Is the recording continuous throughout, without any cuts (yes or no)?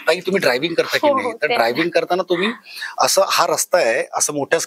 yes